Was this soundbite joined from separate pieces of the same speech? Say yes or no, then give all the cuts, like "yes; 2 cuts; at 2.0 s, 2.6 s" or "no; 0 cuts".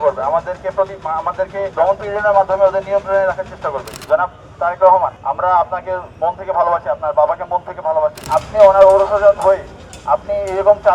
yes; 4 cuts; at 1.7 s, 3.9 s, 5.2 s, 8.2 s